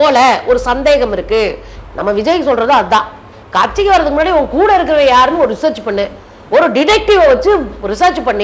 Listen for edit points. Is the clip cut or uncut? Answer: cut